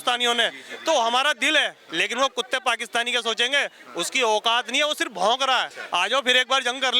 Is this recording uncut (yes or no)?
no